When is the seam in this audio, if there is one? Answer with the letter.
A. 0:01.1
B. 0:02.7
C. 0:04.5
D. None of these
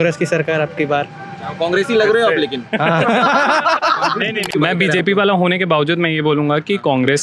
C